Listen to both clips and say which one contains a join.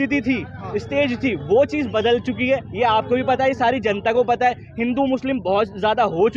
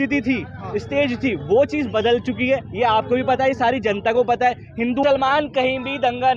second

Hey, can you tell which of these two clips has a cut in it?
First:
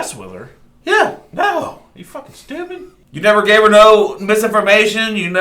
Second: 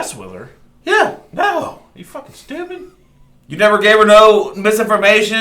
first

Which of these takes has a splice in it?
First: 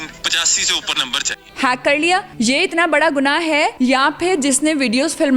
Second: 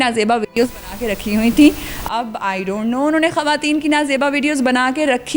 first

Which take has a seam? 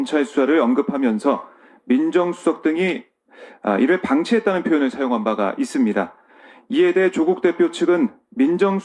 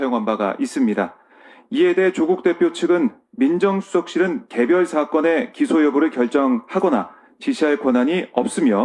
first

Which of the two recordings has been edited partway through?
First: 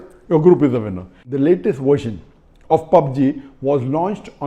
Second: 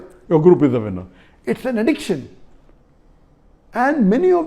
first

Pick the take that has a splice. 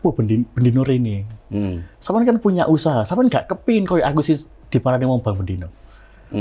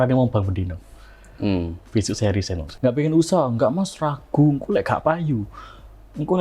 second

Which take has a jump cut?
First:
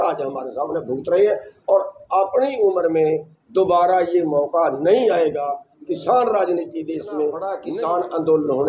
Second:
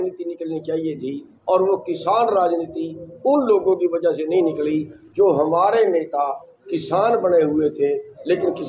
first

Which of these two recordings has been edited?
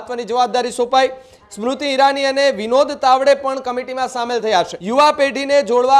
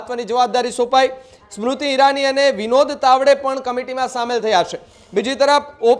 first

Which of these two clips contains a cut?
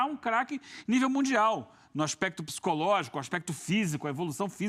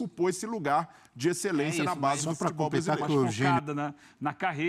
second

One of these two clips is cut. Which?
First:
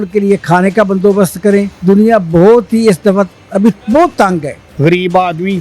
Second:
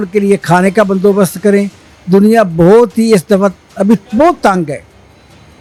first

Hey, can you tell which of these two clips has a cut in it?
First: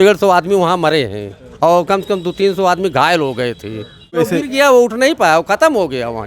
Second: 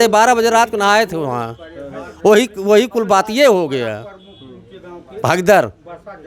first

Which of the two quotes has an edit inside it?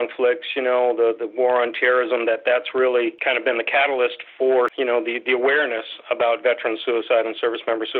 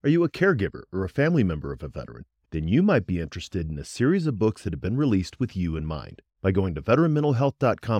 first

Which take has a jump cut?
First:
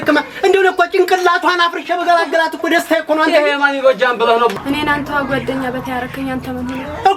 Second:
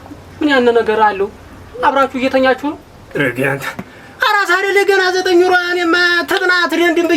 first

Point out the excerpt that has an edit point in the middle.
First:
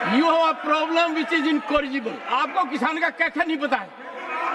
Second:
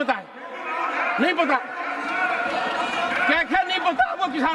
first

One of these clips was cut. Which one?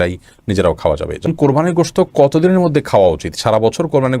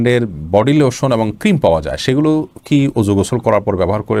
first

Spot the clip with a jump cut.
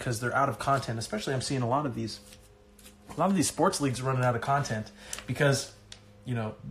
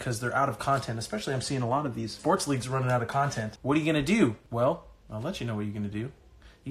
second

